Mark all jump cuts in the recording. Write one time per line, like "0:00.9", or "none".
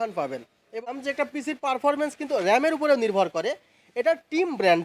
0:01.0